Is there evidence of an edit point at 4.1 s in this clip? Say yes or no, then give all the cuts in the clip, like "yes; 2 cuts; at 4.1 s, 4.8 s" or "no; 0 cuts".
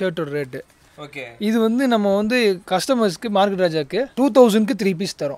yes; 2 cuts; at 2.6 s, 4.1 s